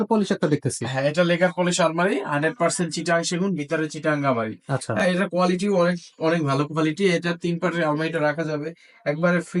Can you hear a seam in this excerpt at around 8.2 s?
no; 0 cuts

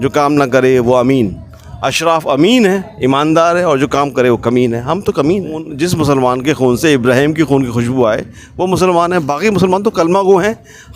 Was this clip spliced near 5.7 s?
yes; 1 cut; at 5.7 s

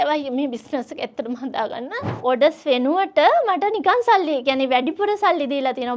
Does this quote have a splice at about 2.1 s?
yes; 1 cut; at 2.1 s

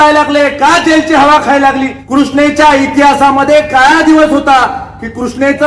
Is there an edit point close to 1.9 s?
yes; 1 cut; at 1.9 s

